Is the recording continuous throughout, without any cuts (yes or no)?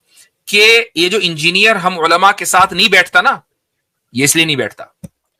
yes